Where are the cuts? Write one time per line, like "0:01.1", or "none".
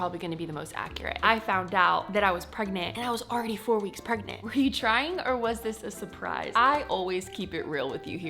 0:01.1
0:04.3
0:06.5